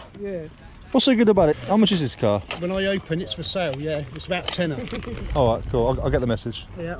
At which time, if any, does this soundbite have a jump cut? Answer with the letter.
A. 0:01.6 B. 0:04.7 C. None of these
A